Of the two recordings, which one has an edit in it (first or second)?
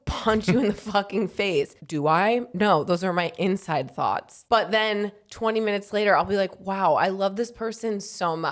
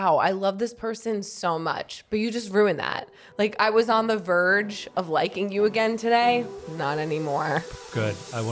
first